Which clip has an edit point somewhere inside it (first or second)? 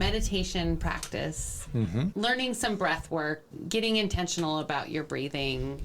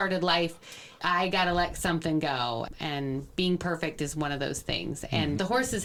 first